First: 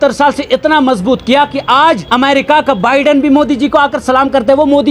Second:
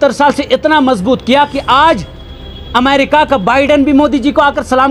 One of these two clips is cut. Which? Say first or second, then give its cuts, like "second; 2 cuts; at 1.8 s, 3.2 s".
first; 1 cut; at 2.0 s